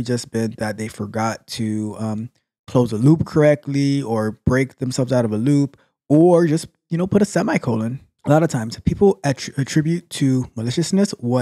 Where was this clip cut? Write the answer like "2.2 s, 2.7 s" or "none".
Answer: 8.1 s